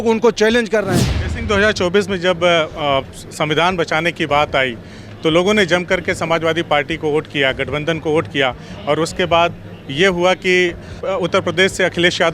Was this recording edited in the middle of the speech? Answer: yes; 2 cuts; at 1.1 s, 11.0 s

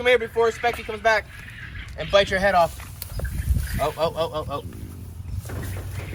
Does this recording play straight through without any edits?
yes; 0 cuts

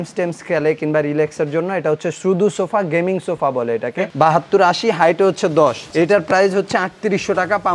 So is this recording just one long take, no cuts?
no; 1 cut; at 4.1 s

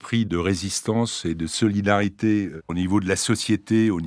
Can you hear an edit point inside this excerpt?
yes; 1 cut; at 2.6 s

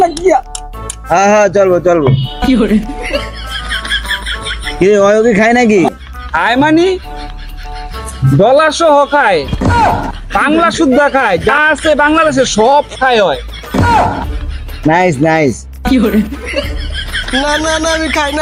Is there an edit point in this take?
no; 0 cuts

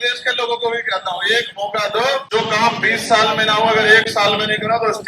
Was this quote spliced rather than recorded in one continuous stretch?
yes; 1 cut; at 2.2 s

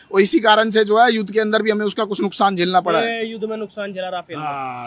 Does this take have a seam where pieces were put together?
no; 0 cuts

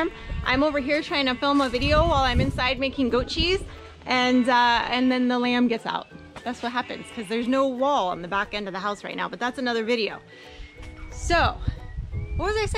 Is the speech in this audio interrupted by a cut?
no; 0 cuts

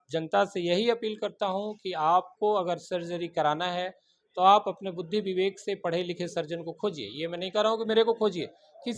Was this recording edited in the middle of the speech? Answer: no; 0 cuts

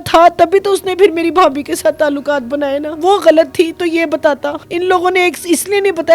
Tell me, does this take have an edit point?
yes; 2 cuts; at 2.9 s, 4.6 s

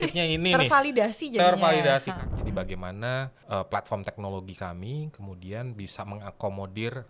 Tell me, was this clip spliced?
yes; 2 cuts; at 2.1 s, 3.4 s

